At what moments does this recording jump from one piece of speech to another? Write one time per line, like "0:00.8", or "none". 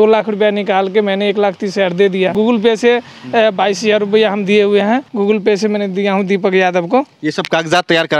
0:02.3
0:05.1